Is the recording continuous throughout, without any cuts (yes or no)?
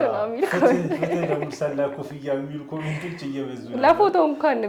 yes